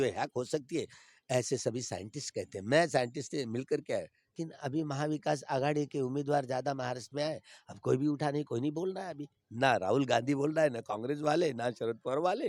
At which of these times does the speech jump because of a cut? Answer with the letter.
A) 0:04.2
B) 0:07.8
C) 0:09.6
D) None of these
A